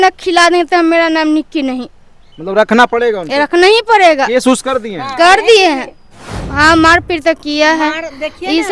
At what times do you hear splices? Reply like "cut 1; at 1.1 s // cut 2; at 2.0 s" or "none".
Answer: cut 1; at 6.4 s